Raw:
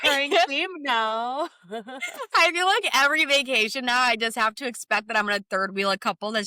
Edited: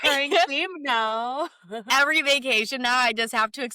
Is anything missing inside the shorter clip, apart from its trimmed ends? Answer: yes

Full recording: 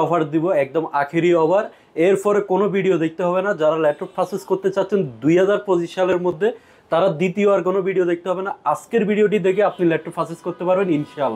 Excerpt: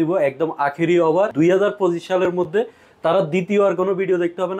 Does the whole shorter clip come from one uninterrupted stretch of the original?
no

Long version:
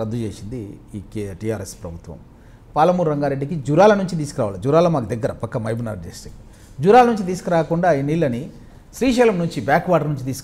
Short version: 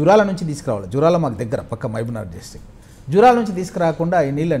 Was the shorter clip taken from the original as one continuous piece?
yes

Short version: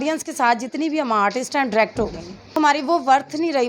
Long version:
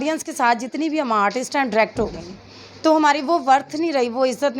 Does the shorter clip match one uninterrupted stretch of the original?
no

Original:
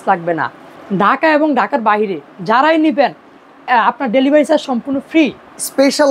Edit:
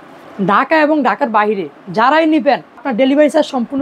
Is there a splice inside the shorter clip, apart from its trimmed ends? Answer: yes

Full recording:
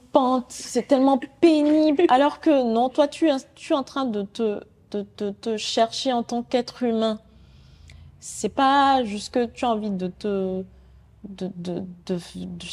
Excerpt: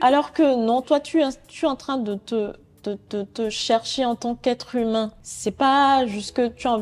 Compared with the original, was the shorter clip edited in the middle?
yes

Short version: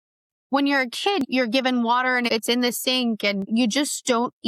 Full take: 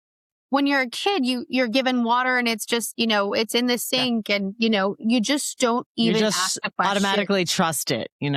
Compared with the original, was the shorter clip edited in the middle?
yes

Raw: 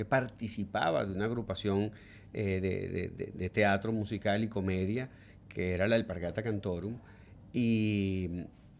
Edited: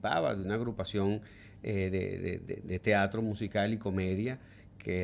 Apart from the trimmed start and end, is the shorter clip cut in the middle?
no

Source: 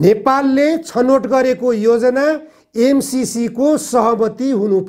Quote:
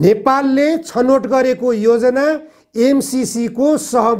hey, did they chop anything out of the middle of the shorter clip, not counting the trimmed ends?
no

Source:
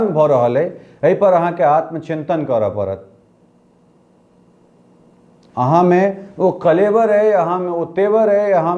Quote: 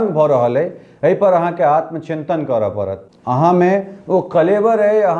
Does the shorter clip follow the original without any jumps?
no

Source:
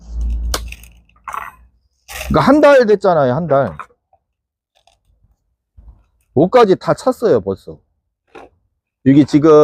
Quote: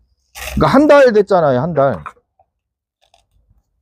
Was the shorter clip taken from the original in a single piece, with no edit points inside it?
yes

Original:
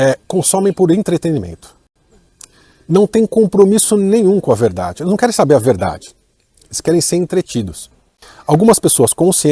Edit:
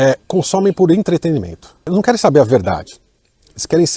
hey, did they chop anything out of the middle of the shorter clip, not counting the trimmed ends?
yes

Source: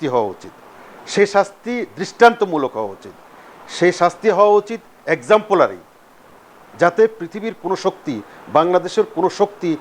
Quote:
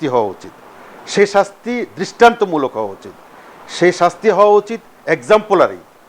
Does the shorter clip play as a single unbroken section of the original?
yes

